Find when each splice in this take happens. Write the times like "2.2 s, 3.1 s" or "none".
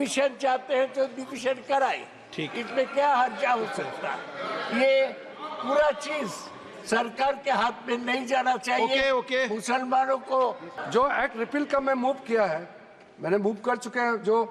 10.7 s

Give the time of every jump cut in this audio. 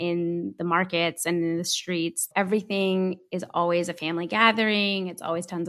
2.2 s

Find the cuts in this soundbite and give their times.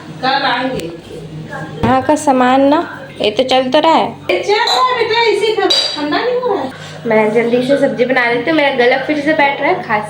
1.8 s, 4.3 s, 6.8 s

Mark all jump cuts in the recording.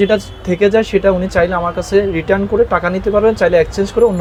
none

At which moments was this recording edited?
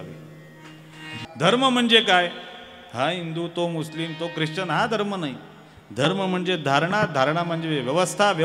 1.3 s

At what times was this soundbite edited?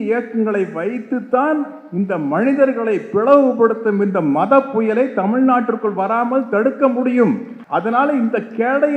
7.5 s

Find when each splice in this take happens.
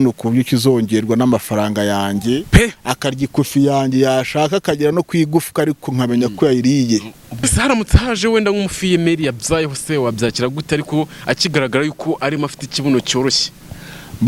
7.4 s

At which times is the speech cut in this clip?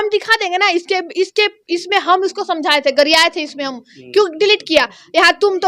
none

